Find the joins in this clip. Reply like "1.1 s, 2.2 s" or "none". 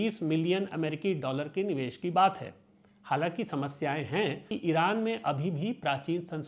4.5 s